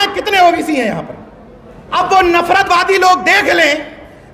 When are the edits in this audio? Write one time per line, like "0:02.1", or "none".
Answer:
0:01.9